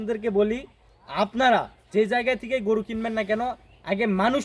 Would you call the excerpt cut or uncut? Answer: uncut